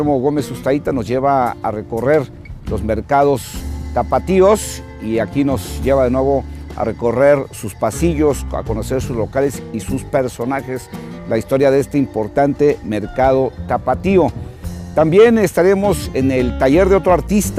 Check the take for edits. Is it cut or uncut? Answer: cut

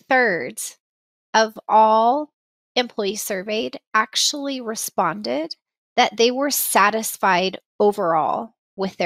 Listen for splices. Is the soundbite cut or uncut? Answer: uncut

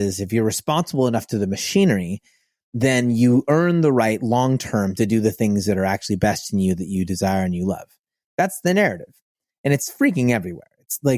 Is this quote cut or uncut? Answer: uncut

